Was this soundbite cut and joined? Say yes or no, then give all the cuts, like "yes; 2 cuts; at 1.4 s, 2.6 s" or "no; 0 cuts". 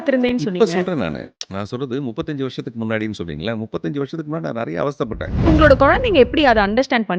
yes; 1 cut; at 5.4 s